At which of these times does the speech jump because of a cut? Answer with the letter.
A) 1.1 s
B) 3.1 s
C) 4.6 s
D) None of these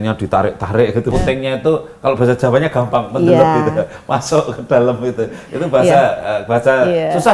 A